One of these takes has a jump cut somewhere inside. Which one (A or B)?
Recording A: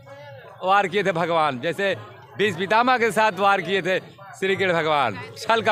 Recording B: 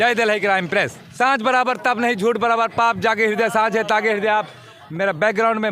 B